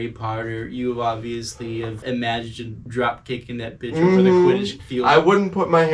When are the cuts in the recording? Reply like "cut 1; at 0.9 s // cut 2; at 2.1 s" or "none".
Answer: none